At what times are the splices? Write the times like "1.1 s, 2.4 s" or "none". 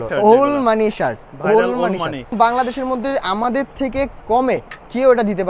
2.3 s